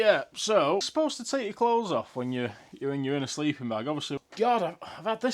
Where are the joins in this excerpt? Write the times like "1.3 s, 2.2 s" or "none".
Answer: 0.9 s, 4.2 s